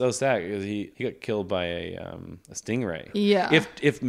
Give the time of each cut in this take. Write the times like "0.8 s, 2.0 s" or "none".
0.9 s, 3.0 s